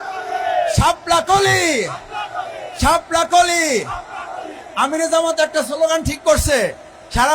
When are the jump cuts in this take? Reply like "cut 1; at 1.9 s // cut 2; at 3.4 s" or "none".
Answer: none